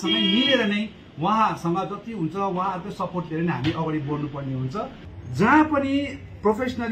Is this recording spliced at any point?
yes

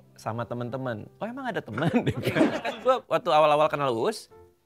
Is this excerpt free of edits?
no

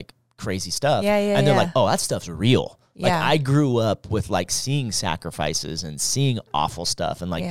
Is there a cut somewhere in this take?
no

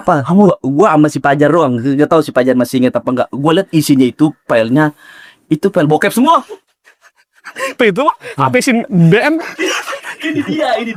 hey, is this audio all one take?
yes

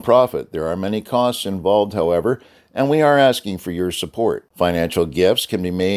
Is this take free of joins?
yes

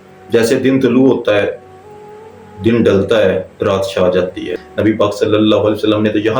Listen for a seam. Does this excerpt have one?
yes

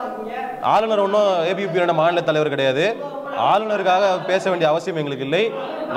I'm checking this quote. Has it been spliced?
no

